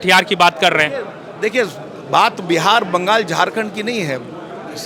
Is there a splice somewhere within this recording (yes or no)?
no